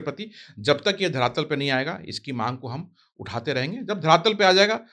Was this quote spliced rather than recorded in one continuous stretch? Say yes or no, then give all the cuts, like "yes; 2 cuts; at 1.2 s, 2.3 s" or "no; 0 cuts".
no; 0 cuts